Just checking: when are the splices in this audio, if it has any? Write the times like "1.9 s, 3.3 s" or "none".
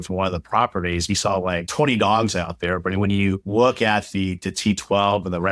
none